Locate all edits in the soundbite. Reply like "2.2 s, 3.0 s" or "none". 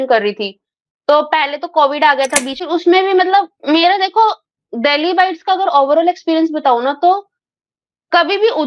2.6 s